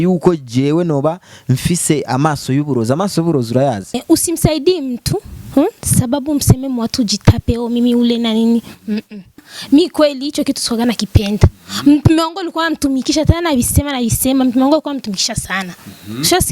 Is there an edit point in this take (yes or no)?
yes